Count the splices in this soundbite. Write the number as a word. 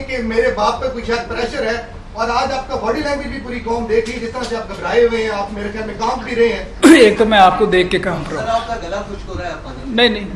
one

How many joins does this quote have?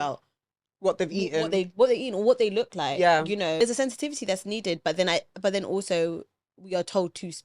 one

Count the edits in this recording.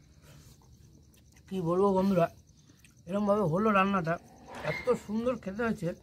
one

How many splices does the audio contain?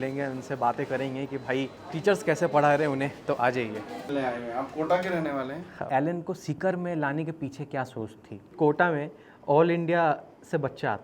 three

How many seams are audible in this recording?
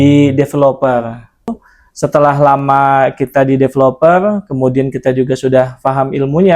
one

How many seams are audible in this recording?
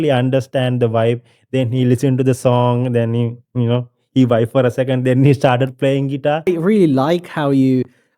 one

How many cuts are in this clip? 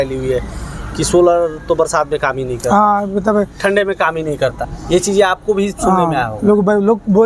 one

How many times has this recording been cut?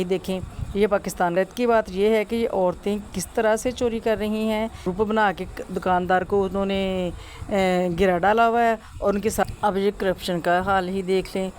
three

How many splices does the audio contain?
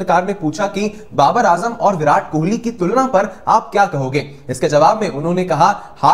zero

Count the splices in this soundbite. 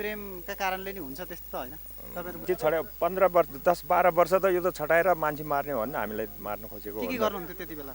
one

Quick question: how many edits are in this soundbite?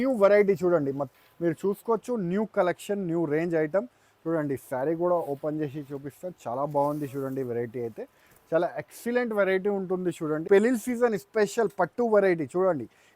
two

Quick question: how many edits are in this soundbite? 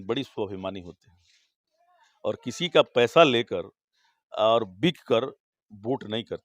zero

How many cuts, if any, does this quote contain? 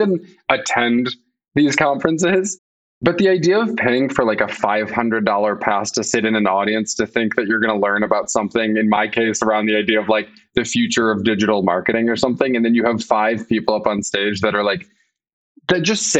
zero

